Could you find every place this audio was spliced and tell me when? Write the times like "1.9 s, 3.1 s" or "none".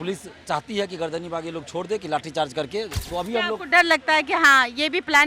3.0 s